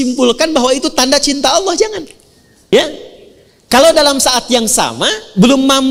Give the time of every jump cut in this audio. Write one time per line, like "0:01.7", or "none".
0:02.7